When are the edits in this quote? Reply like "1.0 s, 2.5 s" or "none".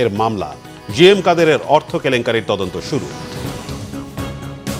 3.5 s